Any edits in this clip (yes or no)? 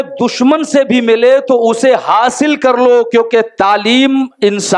no